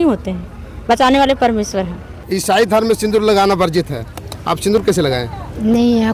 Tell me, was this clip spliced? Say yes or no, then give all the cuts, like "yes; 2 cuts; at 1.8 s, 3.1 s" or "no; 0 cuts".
yes; 1 cut; at 2.2 s